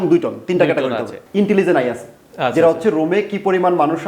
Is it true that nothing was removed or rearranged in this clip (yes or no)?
no